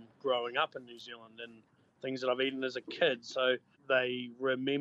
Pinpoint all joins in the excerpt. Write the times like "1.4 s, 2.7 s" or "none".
3.7 s